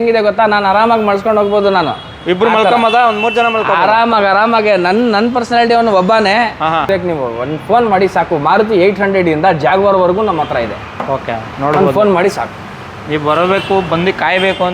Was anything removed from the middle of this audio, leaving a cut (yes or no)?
yes